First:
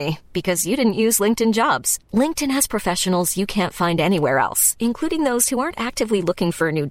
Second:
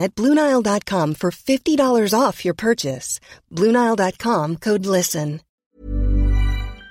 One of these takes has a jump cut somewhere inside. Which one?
second; 1 cut; at 5.6 s

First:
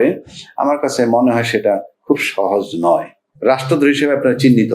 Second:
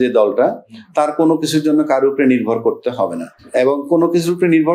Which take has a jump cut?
first; 1 cut; at 3.2 s

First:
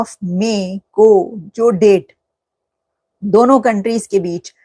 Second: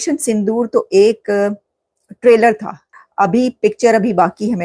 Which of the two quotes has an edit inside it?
second; 1 cut; at 2.9 s

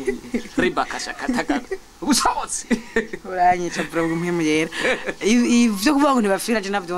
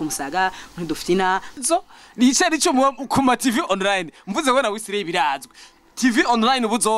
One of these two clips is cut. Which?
second; 1 cut; at 1.6 s

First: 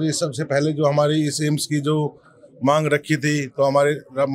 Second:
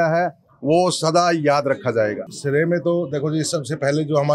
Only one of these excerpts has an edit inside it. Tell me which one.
second; 1 cut; at 2.3 s

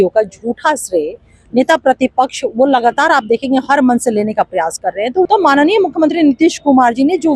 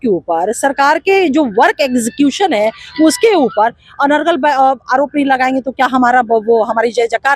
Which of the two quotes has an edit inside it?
first; 1 cut; at 5.3 s

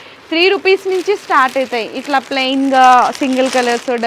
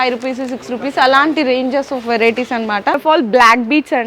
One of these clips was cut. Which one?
second; 1 cut; at 3.0 s

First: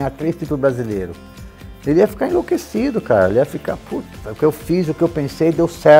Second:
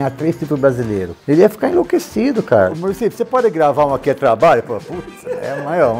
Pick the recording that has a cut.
second; 2 cuts; at 1.1 s, 2.7 s

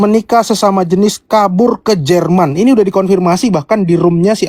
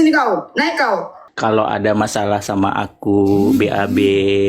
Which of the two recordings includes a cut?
second; 1 cut; at 1.2 s

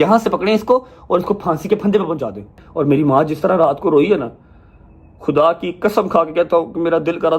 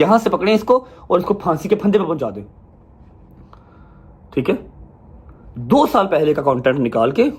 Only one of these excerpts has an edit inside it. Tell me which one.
first; 1 cut; at 2.6 s

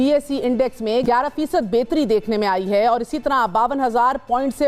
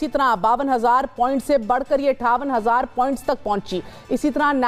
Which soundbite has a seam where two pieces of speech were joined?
first; 1 cut; at 1.0 s

